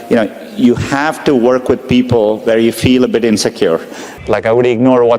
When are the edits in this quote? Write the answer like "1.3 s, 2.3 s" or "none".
4.1 s